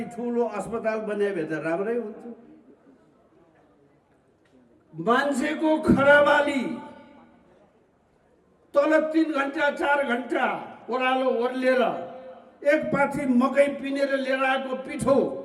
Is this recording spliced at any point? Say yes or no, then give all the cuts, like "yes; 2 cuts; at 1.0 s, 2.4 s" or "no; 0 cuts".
no; 0 cuts